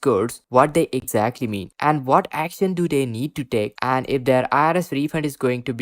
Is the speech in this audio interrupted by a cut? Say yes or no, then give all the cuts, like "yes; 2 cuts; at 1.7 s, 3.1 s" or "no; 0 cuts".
no; 0 cuts